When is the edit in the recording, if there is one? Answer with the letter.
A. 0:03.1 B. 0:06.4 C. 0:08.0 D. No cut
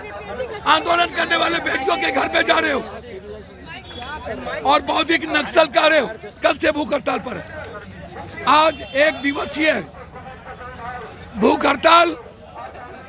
B